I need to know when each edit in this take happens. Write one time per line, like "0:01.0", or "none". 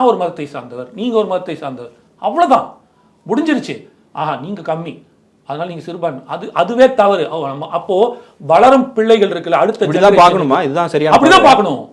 none